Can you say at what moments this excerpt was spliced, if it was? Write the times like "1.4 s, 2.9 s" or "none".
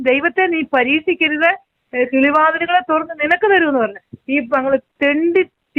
none